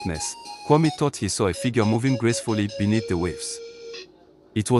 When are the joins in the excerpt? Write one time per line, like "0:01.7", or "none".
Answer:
none